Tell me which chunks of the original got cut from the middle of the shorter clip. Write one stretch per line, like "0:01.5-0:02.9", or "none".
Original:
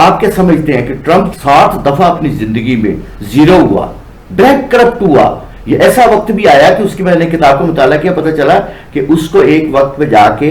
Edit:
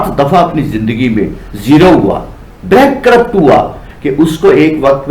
0:05.5-0:08.8

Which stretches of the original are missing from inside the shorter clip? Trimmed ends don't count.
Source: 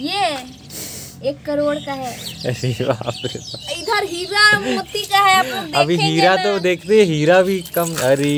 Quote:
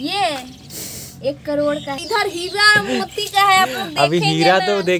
0:02.0-0:03.8

